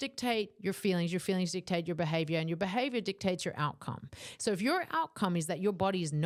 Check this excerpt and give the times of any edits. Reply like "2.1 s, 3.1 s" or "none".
none